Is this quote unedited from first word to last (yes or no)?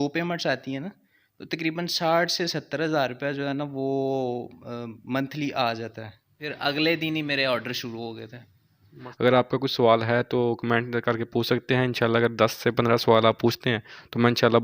no